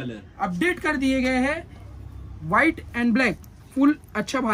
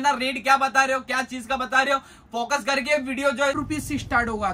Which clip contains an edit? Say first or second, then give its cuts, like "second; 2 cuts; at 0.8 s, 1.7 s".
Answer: second; 1 cut; at 3.6 s